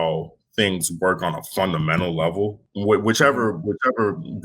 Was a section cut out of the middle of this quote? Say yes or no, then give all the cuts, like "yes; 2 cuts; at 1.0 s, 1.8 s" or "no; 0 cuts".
yes; 1 cut; at 2.7 s